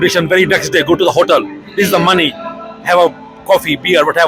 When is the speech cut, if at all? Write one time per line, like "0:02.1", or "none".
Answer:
none